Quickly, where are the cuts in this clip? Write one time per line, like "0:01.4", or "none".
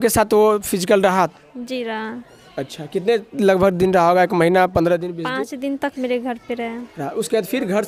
none